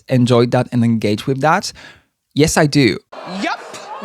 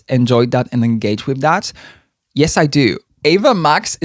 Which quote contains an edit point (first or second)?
second